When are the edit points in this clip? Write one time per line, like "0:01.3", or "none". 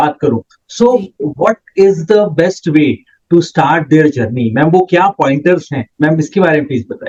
none